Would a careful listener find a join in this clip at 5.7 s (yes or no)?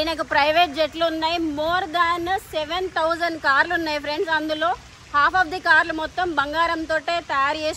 no